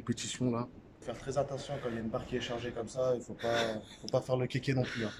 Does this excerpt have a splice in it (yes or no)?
yes